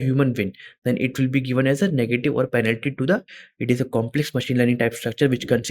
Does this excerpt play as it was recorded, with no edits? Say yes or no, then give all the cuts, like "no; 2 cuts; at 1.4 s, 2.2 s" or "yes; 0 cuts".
no; 1 cut; at 3.4 s